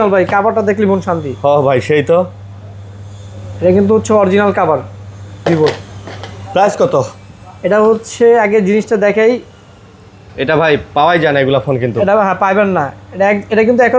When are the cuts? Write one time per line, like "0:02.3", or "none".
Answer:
none